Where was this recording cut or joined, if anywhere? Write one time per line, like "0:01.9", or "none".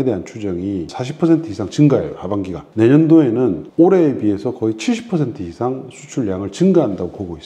0:01.0
0:02.6
0:03.6